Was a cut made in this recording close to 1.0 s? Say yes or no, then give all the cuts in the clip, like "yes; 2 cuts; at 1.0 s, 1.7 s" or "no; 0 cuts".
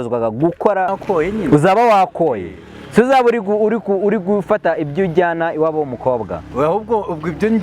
yes; 1 cut; at 1.0 s